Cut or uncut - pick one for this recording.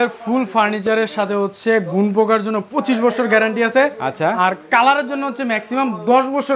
uncut